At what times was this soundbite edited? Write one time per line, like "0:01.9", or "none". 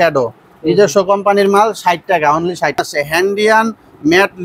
0:02.8